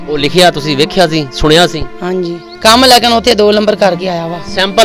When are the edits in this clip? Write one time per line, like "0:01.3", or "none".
0:02.4